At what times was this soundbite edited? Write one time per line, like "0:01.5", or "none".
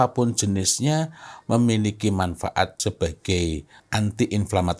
0:02.8
0:03.8